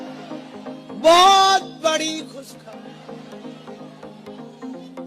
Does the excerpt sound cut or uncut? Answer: cut